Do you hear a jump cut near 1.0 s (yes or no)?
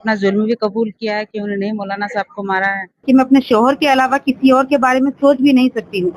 no